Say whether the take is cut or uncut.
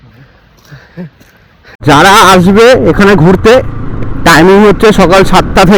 cut